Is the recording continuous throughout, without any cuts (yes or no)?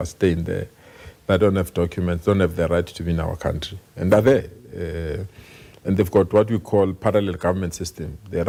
yes